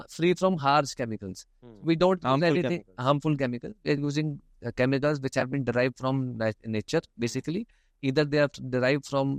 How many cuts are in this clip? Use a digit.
0